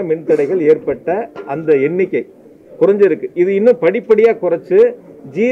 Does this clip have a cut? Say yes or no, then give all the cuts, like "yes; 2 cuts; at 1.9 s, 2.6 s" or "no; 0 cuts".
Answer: no; 0 cuts